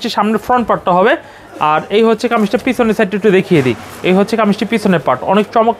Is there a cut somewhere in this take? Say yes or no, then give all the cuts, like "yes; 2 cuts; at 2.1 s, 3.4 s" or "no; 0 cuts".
no; 0 cuts